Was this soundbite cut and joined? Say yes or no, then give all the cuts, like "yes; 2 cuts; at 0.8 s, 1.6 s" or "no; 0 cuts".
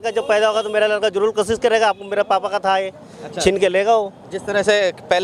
no; 0 cuts